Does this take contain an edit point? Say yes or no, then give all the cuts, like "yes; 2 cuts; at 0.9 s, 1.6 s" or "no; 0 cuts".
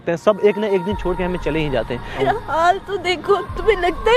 yes; 1 cut; at 2.2 s